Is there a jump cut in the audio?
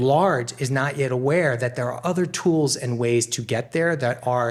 no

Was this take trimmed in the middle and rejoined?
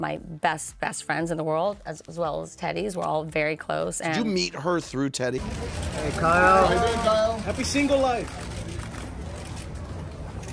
yes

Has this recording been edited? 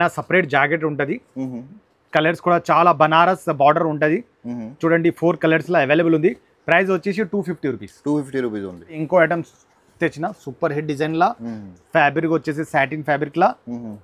no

